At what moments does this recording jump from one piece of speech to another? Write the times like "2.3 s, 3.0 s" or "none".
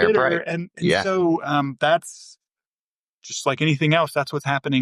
none